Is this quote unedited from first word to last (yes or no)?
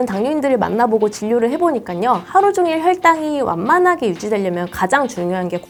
yes